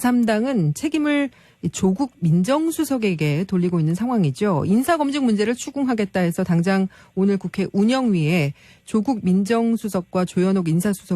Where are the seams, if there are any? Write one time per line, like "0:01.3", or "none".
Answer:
0:08.5